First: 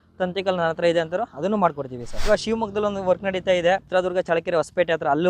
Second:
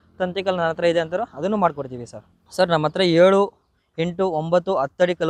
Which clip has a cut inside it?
first; 2 cuts; at 2.3 s, 3.8 s

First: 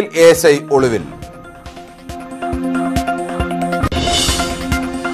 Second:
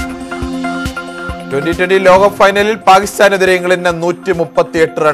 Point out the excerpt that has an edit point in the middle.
second; 2 cuts; at 0.7 s, 1.5 s

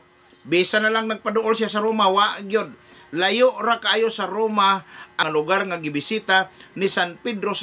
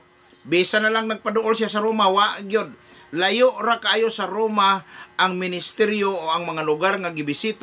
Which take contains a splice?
first; 1 cut; at 5.2 s

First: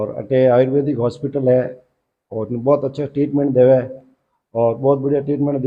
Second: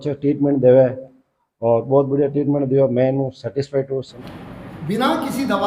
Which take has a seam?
second; 1 cut; at 4.2 s

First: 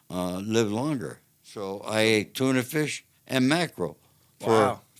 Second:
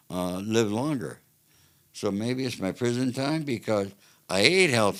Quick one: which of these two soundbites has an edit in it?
first; 1 cut; at 1.8 s

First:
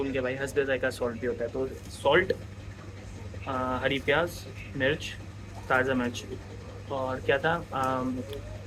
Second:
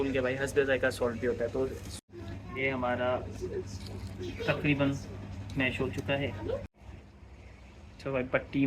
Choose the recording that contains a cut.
second; 2 cuts; at 1.9 s, 6.7 s

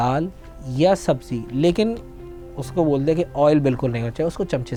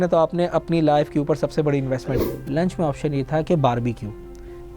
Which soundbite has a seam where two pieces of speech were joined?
second; 1 cut; at 2.0 s

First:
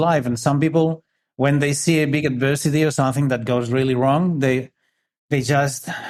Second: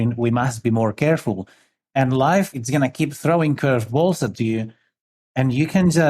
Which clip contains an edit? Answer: second; 2 cuts; at 1.8 s, 2.5 s

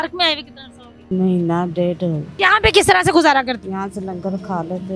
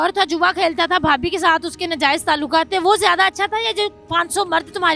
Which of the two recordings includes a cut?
first; 3 cuts; at 1.1 s, 2.3 s, 3.6 s

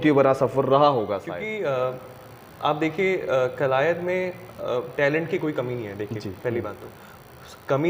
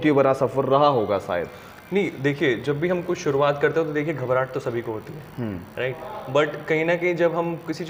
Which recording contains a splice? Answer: first; 1 cut; at 1.3 s

